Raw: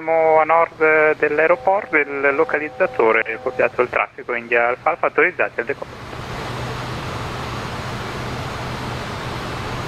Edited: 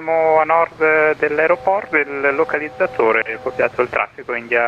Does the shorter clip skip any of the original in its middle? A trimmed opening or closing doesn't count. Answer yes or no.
no